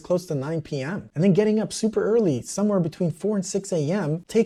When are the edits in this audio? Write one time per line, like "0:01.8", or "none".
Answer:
none

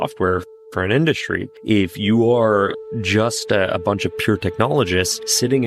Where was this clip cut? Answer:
none

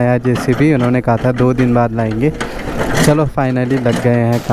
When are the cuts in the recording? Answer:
none

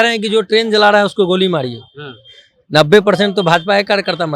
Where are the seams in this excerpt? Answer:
none

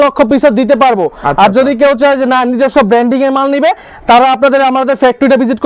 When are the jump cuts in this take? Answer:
none

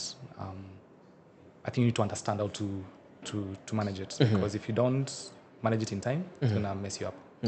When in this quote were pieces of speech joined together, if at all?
none

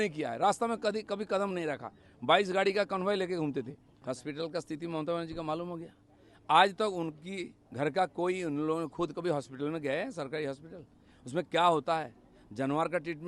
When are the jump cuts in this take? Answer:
0:03.9

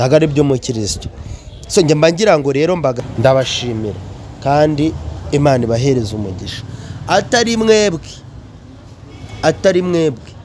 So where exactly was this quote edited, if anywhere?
0:03.0

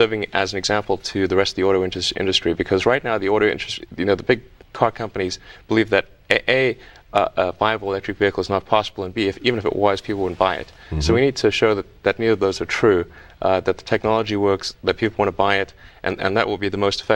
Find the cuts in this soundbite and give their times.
none

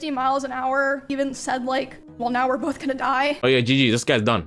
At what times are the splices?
0:01.1
0:02.0
0:03.4

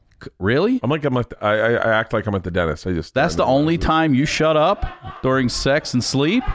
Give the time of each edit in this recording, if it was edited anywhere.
none

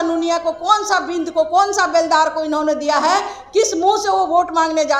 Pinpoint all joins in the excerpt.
none

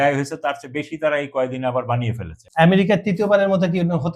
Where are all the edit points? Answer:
0:02.4

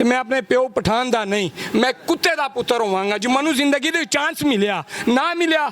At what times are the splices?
none

